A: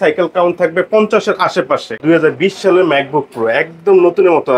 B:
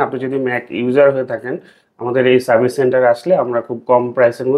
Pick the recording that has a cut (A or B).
A